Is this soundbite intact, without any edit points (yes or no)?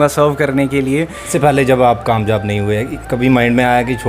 no